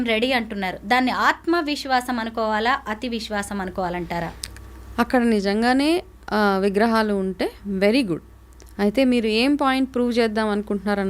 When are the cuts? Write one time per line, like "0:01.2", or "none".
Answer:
none